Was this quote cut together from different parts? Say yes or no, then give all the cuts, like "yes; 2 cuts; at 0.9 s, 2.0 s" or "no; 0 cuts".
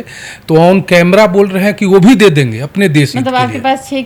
no; 0 cuts